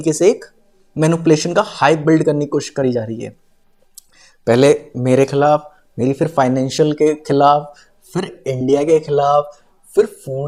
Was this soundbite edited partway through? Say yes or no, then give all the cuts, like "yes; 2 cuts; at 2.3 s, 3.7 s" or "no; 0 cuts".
no; 0 cuts